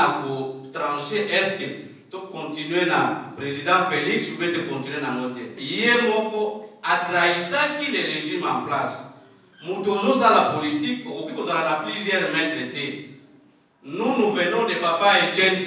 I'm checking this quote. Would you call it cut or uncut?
cut